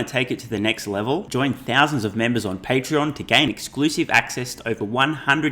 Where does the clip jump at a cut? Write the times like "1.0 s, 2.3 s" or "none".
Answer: none